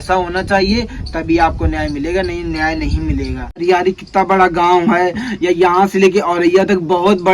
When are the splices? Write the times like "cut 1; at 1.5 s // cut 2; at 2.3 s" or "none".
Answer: cut 1; at 3.6 s

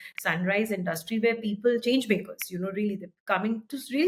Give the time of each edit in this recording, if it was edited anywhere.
none

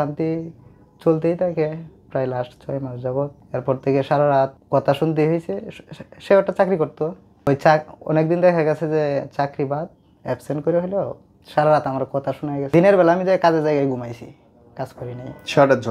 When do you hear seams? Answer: cut 1; at 3.4 s // cut 2; at 4.6 s // cut 3; at 7.3 s // cut 4; at 12.7 s

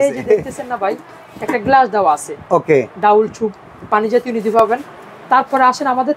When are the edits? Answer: none

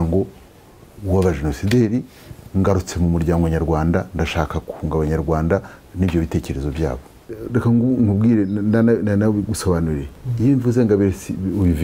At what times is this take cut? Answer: cut 1; at 7.3 s

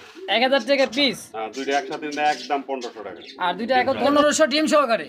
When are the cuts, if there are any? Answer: cut 1; at 4.0 s

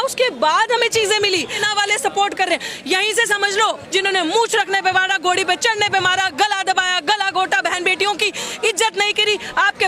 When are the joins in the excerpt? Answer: cut 1; at 1.6 s // cut 2; at 3.8 s

